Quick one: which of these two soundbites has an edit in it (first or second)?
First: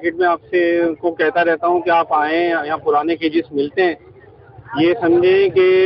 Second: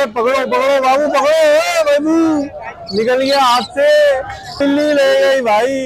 second